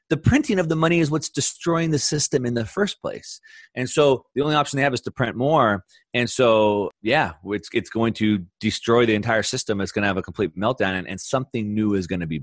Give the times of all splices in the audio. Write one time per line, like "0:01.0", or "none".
0:06.9